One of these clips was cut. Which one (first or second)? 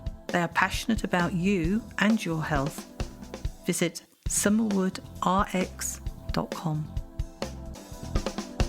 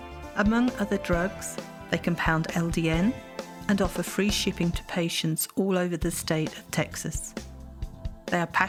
first